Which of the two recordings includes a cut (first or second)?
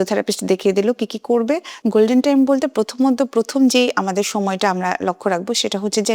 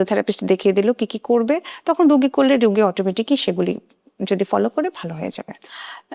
first